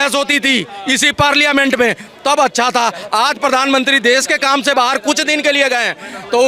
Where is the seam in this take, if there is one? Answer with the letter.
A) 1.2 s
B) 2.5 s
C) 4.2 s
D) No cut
D